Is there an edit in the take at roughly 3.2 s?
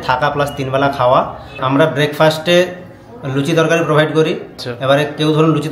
no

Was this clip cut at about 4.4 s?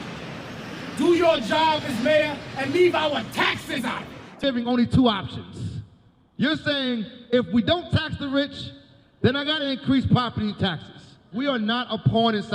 yes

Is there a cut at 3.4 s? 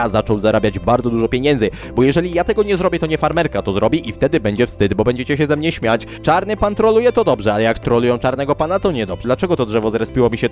no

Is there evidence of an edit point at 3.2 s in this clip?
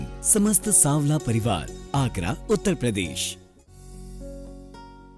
yes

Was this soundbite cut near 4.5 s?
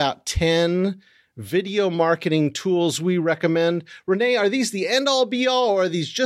no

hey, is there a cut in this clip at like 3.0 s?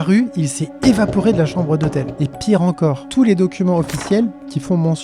yes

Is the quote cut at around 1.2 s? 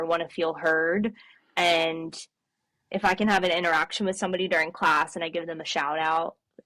no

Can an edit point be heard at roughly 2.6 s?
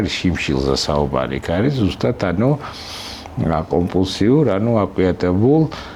no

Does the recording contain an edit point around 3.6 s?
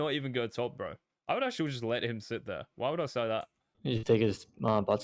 yes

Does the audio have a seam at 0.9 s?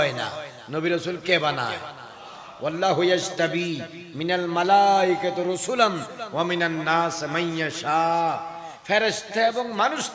no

